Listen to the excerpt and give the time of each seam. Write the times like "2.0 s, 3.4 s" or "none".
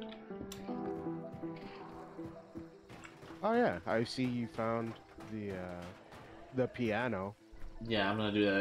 none